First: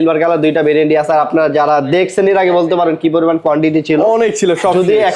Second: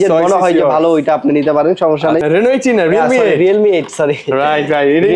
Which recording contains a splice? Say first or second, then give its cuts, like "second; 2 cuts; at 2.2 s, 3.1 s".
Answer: second; 1 cut; at 2.2 s